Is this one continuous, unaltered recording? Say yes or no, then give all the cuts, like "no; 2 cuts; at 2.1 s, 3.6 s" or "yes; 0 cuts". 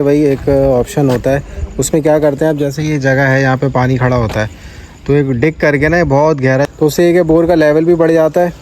no; 1 cut; at 6.7 s